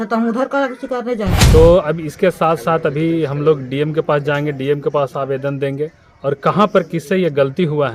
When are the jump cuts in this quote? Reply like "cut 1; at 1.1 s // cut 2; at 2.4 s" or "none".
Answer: cut 1; at 1.5 s